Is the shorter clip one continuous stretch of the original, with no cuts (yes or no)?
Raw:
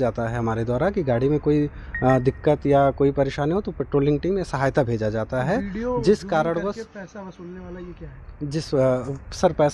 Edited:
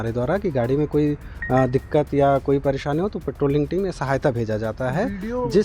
yes